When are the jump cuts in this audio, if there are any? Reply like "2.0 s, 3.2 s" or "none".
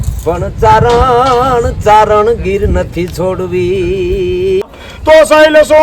4.7 s